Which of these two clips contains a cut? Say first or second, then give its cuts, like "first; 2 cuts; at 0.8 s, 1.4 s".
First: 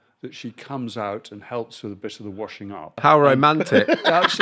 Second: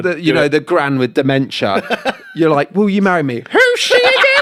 first; 1 cut; at 3.0 s